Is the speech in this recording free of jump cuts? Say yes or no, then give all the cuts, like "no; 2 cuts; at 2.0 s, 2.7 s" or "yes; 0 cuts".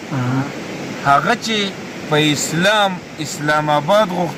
yes; 0 cuts